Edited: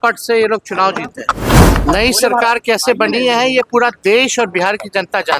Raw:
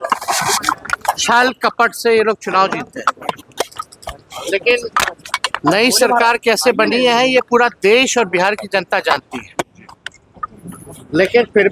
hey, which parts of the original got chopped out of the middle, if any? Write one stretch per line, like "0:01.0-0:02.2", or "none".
0:03.2-0:05.2